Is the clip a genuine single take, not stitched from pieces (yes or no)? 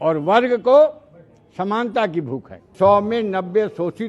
no